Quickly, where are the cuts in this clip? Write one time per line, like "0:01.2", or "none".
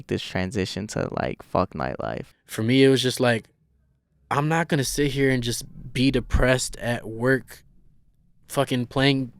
0:02.2